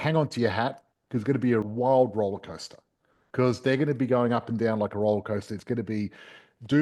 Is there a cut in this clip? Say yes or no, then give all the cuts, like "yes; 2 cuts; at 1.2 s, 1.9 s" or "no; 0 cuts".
yes; 1 cut; at 1.7 s